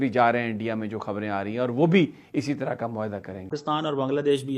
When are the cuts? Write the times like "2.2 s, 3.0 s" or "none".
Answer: 3.6 s